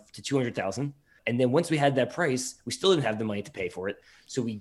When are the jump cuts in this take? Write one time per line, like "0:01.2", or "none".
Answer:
0:01.2